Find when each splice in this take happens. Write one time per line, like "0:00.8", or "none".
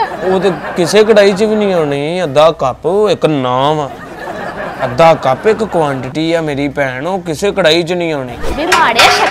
0:08.4